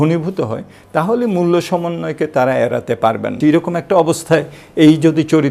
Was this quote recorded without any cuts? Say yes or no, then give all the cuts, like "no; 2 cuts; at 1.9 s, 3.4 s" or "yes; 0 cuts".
no; 1 cut; at 3.3 s